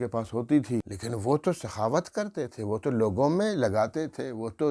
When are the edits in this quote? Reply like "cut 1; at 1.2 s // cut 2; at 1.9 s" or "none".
cut 1; at 1.0 s